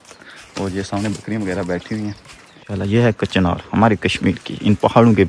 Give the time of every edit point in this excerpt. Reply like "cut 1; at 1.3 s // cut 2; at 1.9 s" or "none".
cut 1; at 2.7 s